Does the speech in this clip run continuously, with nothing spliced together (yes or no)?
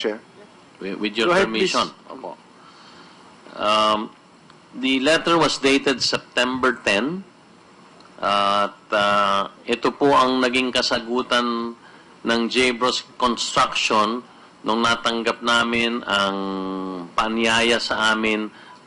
no